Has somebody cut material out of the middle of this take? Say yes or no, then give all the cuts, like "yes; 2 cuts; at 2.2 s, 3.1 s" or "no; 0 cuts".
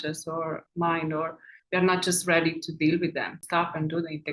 yes; 1 cut; at 3.3 s